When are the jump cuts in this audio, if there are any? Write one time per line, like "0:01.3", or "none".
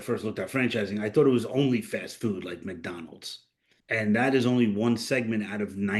0:03.7